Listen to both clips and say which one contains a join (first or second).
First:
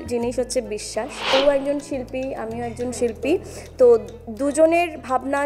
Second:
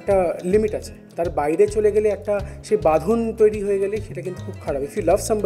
first